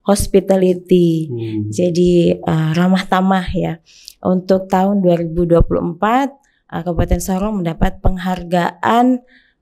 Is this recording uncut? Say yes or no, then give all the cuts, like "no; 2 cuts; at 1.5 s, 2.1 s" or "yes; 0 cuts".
yes; 0 cuts